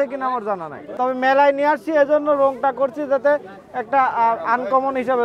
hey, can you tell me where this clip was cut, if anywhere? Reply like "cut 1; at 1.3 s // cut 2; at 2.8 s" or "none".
cut 1; at 1.0 s